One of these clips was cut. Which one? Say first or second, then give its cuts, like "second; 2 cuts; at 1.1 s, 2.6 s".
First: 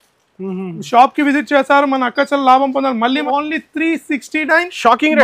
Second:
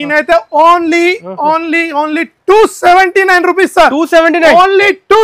first; 1 cut; at 3.2 s